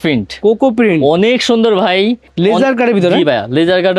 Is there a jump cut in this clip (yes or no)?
yes